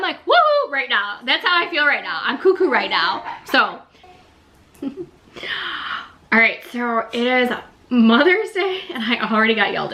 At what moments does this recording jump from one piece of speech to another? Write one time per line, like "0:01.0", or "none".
0:04.2